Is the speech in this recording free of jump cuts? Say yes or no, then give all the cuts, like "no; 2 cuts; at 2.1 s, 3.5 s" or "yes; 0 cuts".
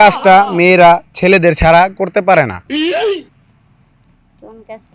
no; 2 cuts; at 2.5 s, 3.3 s